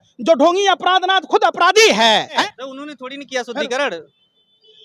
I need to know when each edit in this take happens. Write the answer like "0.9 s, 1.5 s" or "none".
2.4 s